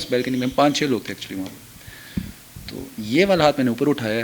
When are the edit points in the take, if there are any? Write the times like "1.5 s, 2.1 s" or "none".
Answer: none